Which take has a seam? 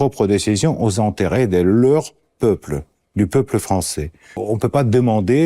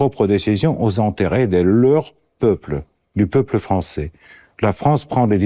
first; 1 cut; at 4.4 s

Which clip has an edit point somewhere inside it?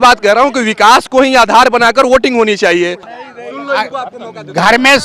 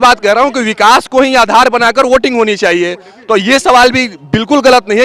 first; 1 cut; at 3.1 s

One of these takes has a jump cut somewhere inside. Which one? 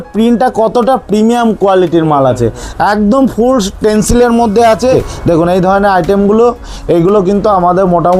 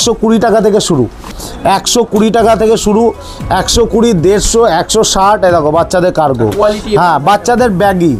first; 1 cut; at 5.1 s

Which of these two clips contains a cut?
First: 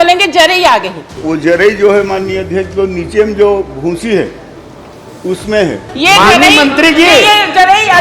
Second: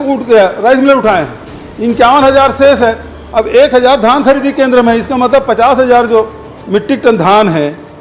first; 2 cuts; at 1.2 s, 5.9 s

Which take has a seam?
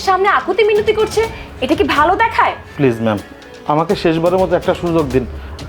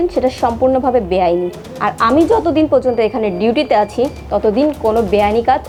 first; 1 cut; at 2.7 s

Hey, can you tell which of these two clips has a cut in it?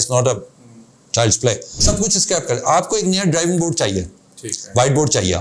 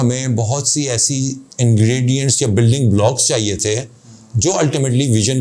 first; 1 cut; at 1.8 s

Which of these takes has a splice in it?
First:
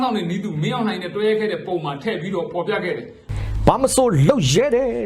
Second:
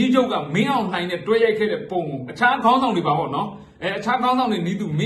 first; 1 cut; at 3.3 s

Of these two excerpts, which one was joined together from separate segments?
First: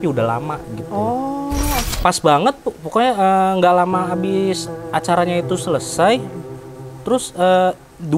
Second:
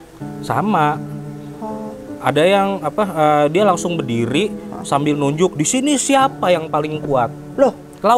first; 1 cut; at 1.8 s

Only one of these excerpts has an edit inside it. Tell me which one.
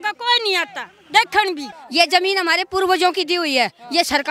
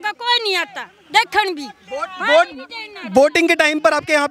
first; 1 cut; at 1.7 s

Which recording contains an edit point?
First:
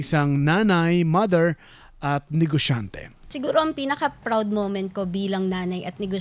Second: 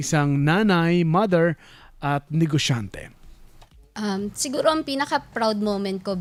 first; 1 cut; at 3.3 s

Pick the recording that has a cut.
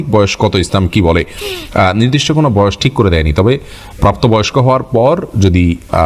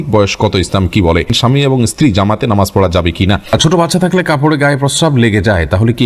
second; 2 cuts; at 1.4 s, 3.4 s

